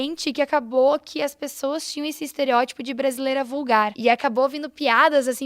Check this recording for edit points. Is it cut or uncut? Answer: cut